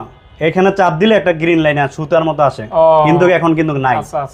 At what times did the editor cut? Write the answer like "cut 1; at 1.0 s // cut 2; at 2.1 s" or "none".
none